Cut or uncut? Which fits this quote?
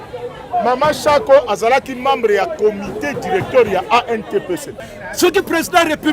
cut